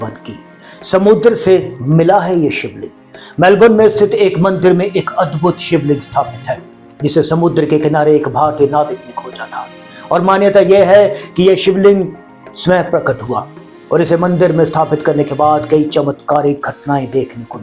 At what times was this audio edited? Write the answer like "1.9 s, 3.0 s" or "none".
none